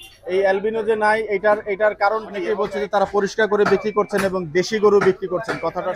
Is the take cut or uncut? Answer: cut